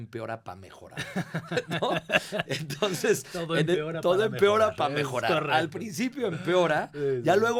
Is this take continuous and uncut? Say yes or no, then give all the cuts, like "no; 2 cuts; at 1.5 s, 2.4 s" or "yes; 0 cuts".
yes; 0 cuts